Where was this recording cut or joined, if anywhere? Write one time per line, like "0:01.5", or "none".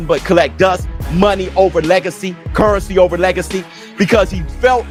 none

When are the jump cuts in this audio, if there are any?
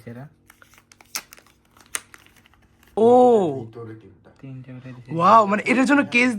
0:03.0

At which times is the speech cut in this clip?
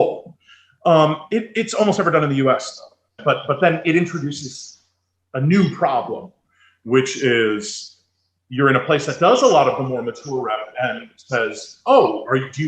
0:03.1

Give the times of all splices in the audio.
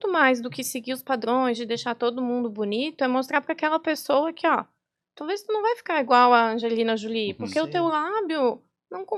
none

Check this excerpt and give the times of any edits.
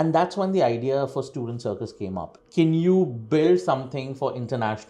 0:02.4

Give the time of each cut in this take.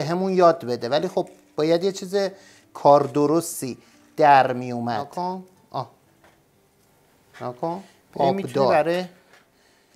0:05.1
0:08.7

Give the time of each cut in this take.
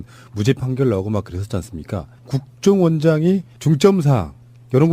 0:03.2

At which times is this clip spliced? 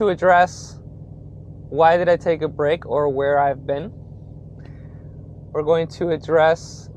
none

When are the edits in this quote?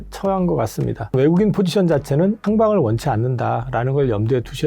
0:01.1
0:02.4

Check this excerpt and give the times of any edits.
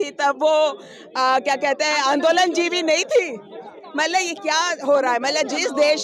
none

